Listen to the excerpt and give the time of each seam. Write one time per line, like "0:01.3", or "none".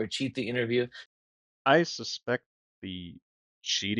0:01.0